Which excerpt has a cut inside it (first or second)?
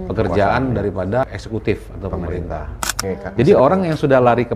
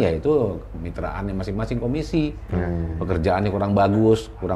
first